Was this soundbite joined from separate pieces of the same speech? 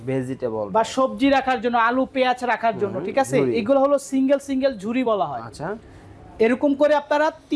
no; 0 cuts

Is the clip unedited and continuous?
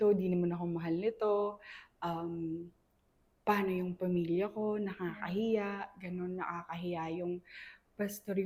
yes; 0 cuts

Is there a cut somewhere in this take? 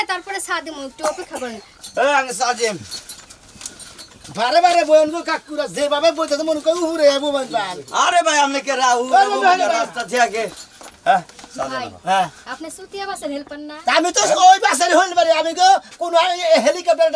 yes; 1 cut; at 1.7 s

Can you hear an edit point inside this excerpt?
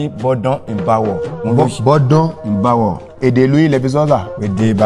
yes; 2 cuts; at 1.3 s, 3.2 s

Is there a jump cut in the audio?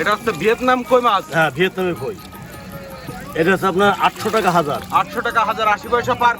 yes; 1 cut; at 3.1 s

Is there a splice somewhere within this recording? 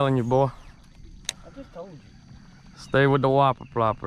no; 0 cuts

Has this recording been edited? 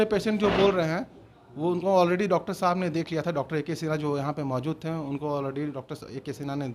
no; 0 cuts

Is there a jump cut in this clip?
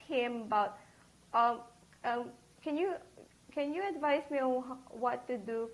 no; 0 cuts

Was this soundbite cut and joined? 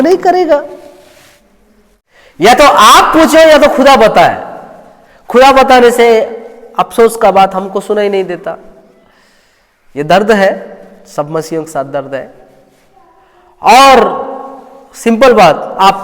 yes; 1 cut; at 2.0 s

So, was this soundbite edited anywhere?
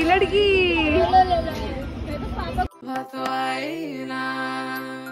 yes; 1 cut; at 2.7 s

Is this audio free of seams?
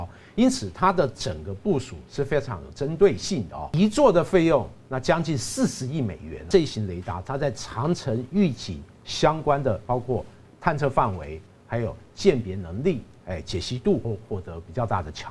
no; 3 cuts; at 3.6 s, 6.4 s, 14.0 s

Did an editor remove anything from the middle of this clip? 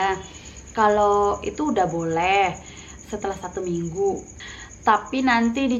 yes; 1 cut; at 4.3 s

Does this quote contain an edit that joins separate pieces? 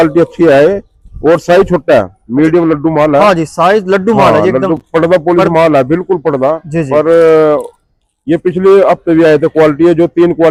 no; 0 cuts

